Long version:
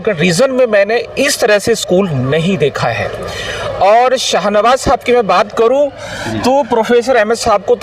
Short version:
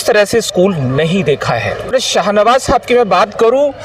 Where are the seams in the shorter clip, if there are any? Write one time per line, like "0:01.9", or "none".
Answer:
0:01.9